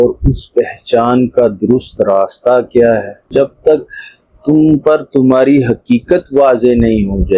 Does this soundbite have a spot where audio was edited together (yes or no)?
yes